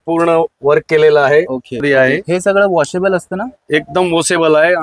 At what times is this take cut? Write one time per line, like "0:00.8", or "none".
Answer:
0:01.8